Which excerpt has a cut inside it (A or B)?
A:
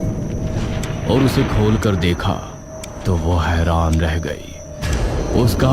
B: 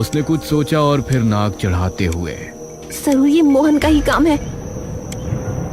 A